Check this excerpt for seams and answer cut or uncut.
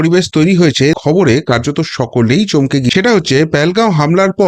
cut